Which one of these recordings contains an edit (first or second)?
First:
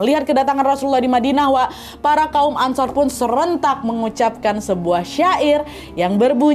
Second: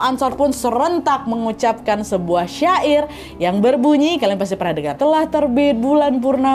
second